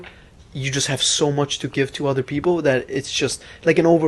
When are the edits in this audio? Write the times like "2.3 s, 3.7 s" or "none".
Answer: none